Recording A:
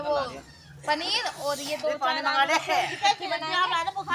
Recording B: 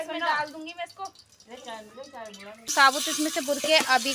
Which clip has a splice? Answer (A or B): B